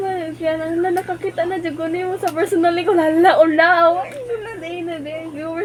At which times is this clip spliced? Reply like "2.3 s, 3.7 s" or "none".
none